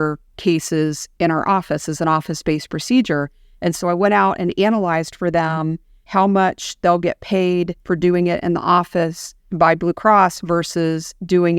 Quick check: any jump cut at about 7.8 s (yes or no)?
yes